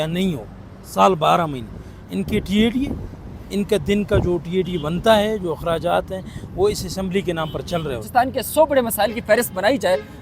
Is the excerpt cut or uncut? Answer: cut